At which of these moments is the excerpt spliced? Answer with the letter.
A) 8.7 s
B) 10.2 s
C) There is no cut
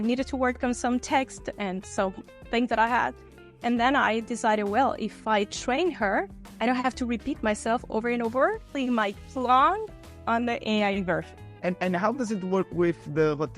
A